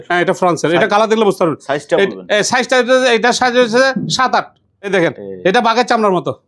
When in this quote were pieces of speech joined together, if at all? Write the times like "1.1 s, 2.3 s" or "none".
4.9 s